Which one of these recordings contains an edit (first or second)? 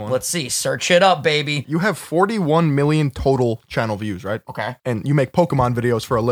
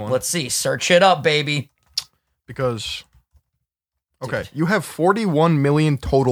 first